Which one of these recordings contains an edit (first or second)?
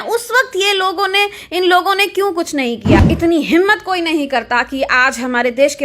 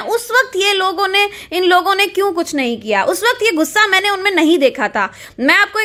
first